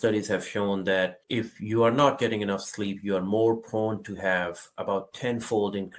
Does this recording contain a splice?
yes; 1 cut; at 1.2 s

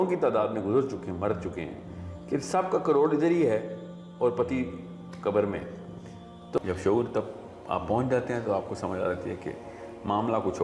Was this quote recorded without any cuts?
no; 1 cut; at 6.6 s

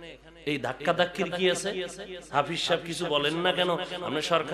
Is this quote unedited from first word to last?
yes; 0 cuts

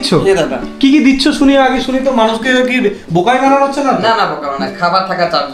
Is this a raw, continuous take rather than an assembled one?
yes; 0 cuts

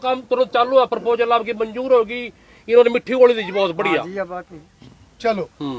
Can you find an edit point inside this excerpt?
no; 0 cuts

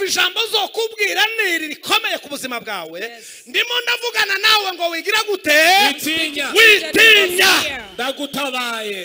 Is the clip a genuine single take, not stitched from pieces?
yes; 0 cuts

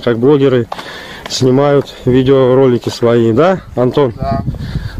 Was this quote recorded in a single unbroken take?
yes; 0 cuts

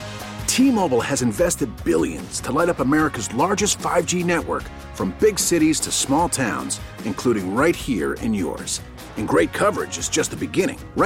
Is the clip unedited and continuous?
yes; 0 cuts

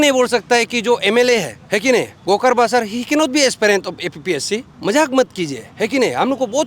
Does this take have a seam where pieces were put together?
yes; 2 cuts; at 1.6 s, 4.7 s

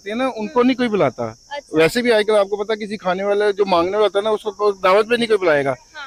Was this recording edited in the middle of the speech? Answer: no; 0 cuts

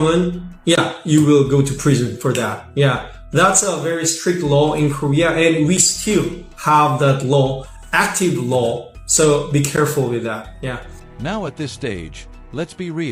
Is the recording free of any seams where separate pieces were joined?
yes; 0 cuts

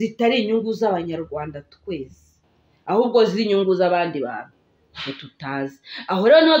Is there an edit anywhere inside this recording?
no; 0 cuts

